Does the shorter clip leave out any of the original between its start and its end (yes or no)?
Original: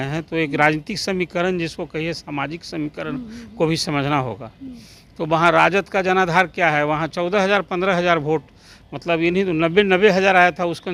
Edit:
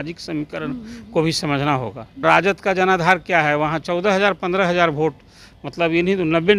yes